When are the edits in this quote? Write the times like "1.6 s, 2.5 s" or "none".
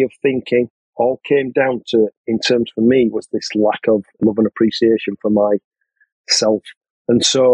4.2 s